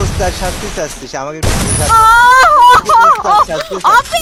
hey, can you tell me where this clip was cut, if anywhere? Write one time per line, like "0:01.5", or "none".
none

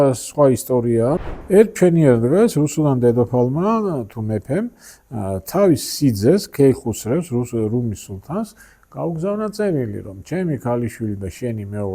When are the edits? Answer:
0:01.2

